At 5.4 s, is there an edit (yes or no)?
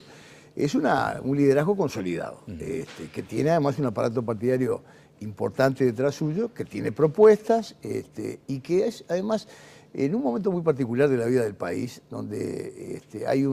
yes